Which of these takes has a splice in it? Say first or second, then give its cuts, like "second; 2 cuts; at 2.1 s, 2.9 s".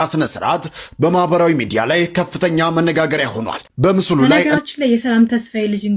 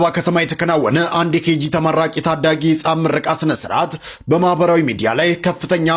first; 1 cut; at 4.3 s